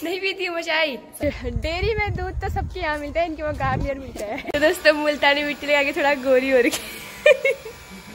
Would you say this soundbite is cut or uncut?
cut